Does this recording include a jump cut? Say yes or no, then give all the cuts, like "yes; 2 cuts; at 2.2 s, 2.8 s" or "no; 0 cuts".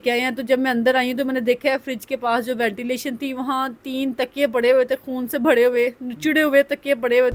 no; 0 cuts